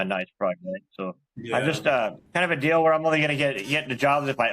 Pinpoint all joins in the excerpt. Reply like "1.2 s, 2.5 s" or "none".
1.0 s, 2.2 s